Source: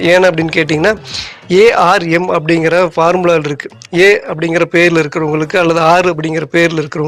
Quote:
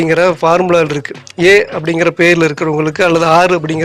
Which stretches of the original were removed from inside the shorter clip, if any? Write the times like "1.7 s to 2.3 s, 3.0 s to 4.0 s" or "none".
none

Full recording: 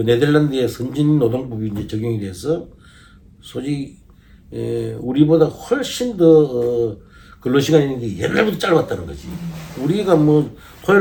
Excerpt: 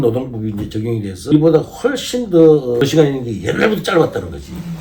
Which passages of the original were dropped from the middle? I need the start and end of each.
2.5 s to 5.2 s, 6.7 s to 7.6 s

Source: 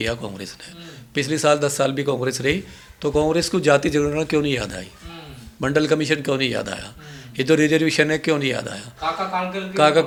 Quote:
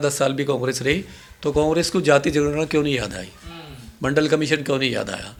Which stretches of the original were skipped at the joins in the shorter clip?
none

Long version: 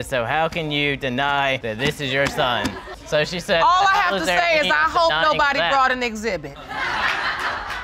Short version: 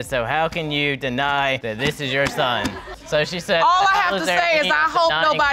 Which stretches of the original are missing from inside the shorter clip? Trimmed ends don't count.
none

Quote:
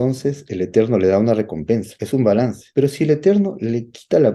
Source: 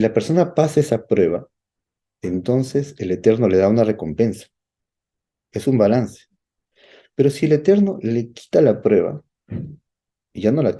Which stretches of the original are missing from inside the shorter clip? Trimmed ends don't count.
4.4 s to 5.5 s, 6.2 s to 7.0 s

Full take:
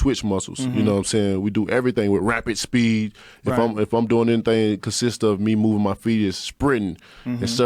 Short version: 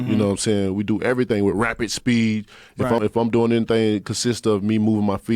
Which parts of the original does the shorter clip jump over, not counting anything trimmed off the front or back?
3.7 s to 3.8 s

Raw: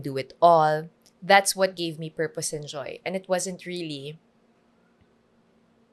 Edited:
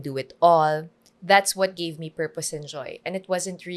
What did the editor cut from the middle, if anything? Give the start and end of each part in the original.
none

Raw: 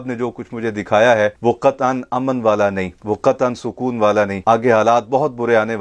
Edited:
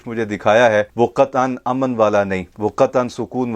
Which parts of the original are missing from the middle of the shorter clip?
none

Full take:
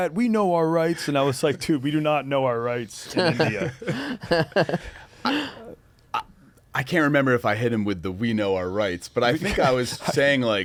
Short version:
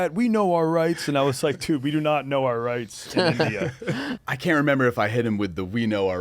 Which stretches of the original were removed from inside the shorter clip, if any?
4.2 s to 6.7 s

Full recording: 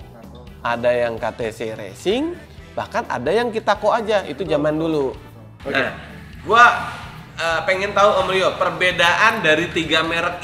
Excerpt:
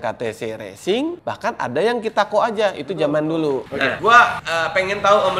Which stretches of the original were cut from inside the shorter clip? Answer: 2.4 s to 2.7 s, 5.3 s to 6.3 s, 6.9 s to 7.3 s

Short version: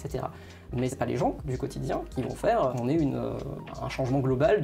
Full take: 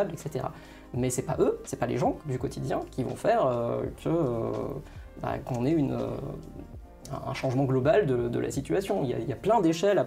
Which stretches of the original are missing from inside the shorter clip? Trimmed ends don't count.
1.1 s to 1.7 s, 3.5 s to 5.5 s, 6.4 s to 7.1 s

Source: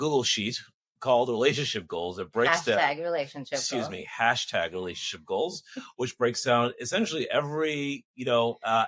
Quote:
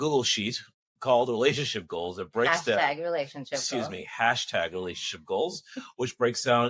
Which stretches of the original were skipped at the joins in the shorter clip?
none

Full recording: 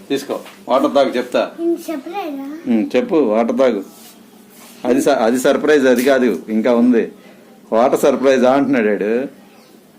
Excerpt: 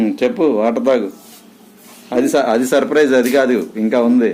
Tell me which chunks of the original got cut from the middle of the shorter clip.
none

